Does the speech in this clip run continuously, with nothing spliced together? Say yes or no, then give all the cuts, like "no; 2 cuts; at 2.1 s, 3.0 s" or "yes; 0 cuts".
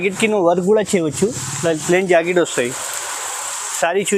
yes; 0 cuts